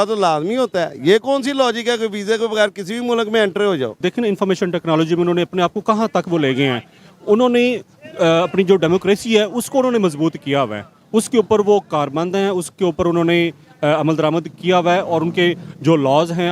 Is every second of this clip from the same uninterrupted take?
no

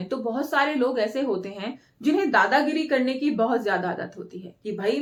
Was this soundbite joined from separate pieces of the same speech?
no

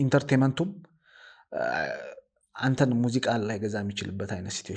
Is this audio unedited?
yes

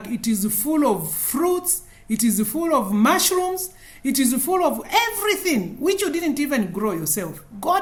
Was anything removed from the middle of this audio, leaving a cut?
no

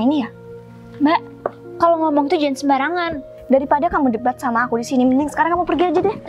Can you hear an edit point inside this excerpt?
yes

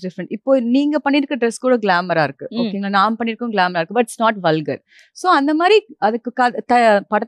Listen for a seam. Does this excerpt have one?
no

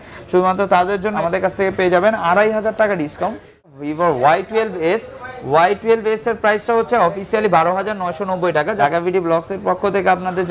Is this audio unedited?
no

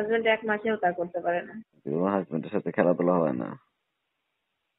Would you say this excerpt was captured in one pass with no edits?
no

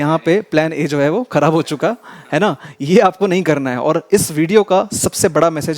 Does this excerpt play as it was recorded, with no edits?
yes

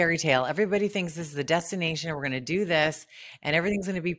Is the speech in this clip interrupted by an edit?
no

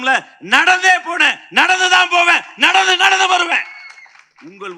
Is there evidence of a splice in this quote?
no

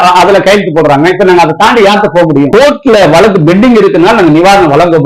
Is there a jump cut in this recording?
yes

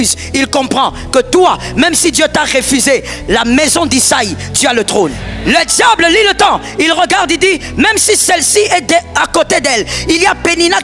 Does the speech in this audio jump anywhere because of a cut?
yes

